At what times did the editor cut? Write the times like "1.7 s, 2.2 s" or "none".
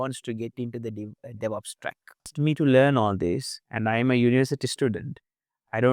2.3 s